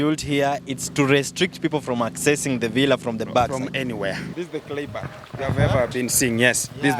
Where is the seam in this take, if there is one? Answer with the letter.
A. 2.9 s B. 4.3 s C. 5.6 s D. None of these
B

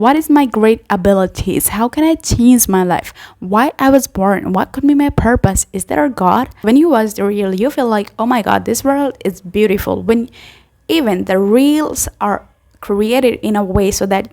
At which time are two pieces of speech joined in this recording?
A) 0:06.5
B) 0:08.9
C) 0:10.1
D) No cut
A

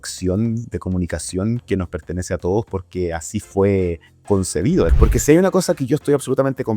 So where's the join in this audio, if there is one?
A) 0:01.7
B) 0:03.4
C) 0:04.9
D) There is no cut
C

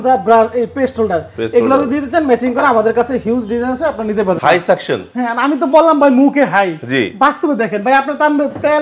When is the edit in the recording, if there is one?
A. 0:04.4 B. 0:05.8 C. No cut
A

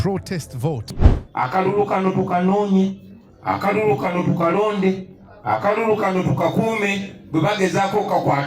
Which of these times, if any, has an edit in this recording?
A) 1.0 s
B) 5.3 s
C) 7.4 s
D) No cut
A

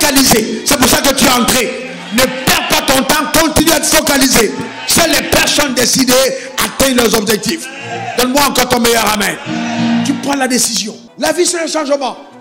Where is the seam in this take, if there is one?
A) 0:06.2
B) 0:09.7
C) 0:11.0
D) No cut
C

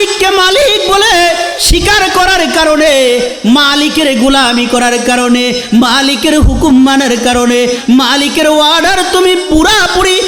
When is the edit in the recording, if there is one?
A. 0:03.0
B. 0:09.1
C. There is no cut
C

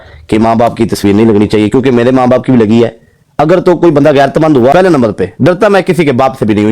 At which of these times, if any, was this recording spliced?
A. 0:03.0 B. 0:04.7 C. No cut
B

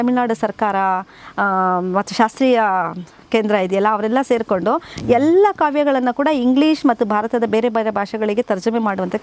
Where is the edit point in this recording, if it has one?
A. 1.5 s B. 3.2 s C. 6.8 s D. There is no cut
D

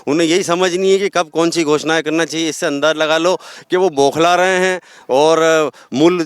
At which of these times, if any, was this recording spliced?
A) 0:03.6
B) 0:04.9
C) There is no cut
C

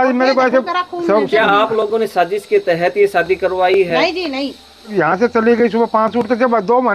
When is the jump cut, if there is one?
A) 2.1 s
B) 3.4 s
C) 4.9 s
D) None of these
C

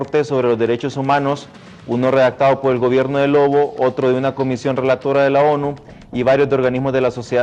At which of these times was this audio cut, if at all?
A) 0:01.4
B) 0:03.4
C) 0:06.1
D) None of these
B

